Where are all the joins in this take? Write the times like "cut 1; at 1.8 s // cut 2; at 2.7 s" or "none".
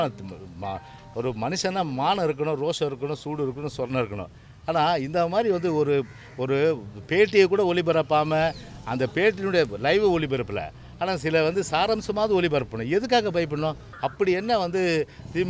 cut 1; at 13.9 s